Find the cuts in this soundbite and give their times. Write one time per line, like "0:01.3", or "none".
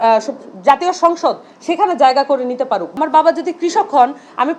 0:02.9

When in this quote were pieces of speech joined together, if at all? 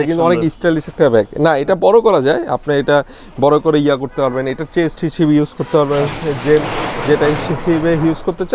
none

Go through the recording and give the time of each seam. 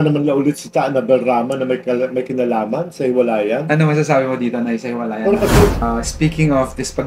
0:05.8

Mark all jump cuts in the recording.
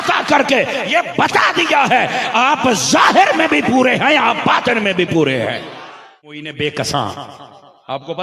0:06.4

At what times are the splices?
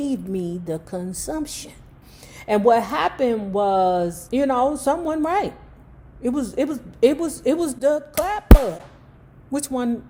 none

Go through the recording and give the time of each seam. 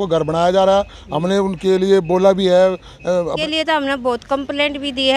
0:03.4

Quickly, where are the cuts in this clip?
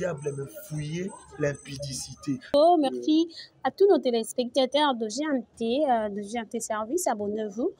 0:02.5

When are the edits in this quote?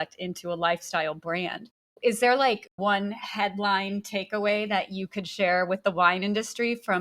0:01.8
0:02.8

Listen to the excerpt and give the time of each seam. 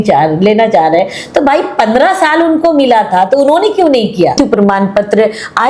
0:04.3

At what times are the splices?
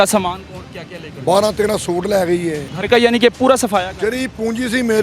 0:02.7

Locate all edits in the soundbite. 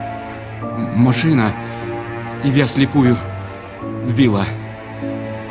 0:04.6

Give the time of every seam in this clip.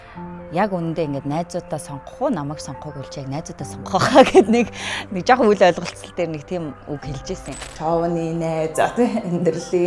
0:07.6

